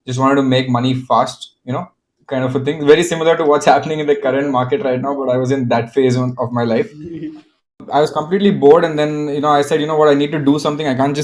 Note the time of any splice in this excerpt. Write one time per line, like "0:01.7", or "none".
0:07.8